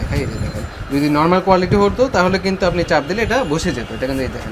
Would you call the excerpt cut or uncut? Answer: uncut